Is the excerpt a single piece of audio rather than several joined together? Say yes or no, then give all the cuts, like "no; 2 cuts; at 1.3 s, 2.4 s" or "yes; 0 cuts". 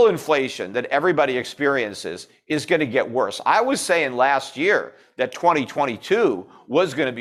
yes; 0 cuts